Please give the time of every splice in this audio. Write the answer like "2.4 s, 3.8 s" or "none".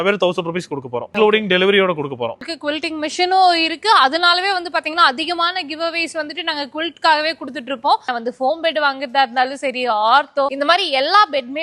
1.0 s, 2.5 s, 8.0 s, 10.5 s